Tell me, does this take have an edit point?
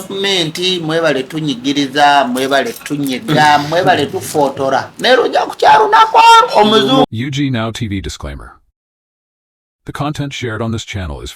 yes; 1 cut; at 7.1 s

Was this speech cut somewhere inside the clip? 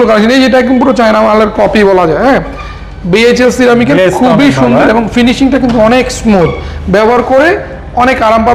no; 0 cuts

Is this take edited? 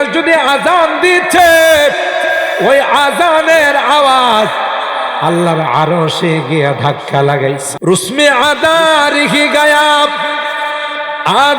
yes; 1 cut; at 7.7 s

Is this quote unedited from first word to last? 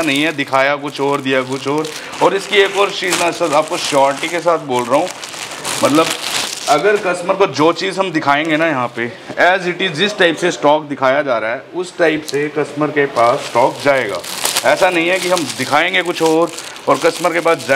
yes; 0 cuts

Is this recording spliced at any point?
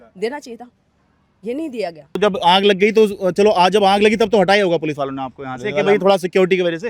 yes; 1 cut; at 2.2 s

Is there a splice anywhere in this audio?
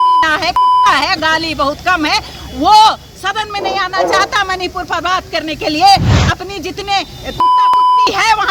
no; 0 cuts

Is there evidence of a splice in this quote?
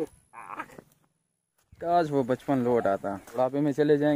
yes; 2 cuts; at 1.6 s, 3.2 s

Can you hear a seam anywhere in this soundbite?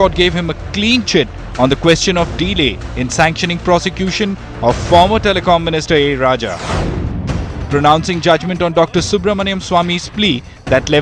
no; 0 cuts

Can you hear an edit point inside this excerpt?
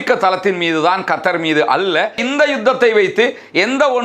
yes; 1 cut; at 2.2 s

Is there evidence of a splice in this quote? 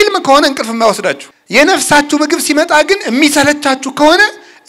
yes; 1 cut; at 1.3 s

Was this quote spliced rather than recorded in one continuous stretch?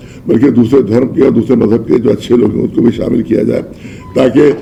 no; 0 cuts

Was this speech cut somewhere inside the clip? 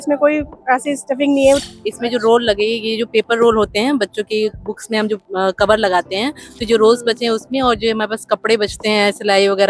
yes; 1 cut; at 1.6 s

